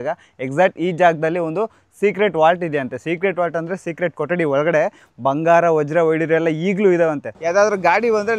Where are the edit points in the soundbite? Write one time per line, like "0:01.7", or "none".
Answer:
0:07.3